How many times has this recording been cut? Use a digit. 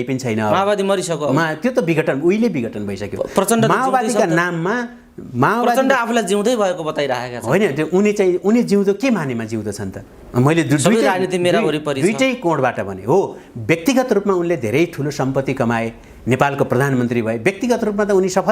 0